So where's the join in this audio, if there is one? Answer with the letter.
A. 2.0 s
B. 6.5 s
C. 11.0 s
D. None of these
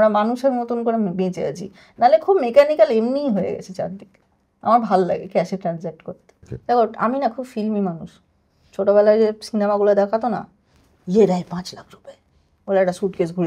B